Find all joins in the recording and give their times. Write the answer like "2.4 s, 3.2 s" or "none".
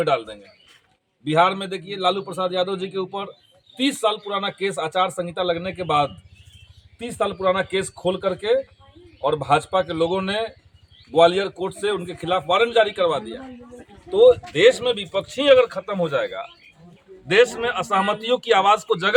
none